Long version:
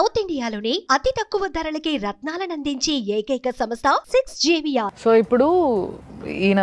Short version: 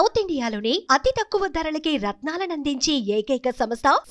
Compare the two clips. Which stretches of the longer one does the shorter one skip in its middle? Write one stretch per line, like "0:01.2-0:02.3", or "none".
none